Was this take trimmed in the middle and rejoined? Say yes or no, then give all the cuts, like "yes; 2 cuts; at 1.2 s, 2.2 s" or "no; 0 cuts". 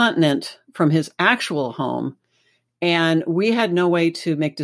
no; 0 cuts